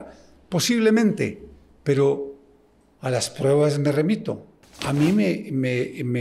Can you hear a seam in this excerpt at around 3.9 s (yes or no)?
no